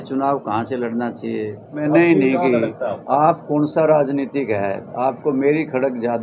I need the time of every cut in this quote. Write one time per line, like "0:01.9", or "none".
0:01.8